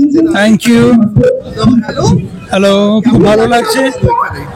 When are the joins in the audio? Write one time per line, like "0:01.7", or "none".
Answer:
none